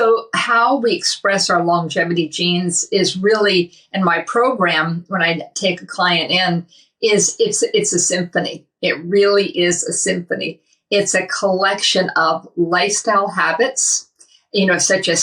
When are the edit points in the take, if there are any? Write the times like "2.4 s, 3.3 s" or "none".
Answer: none